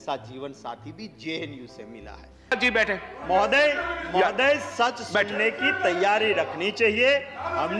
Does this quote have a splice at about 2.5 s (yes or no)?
yes